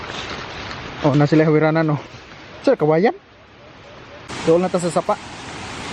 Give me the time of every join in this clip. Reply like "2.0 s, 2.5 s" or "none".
4.3 s